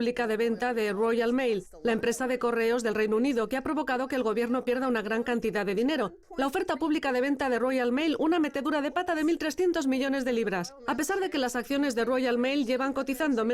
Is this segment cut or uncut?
cut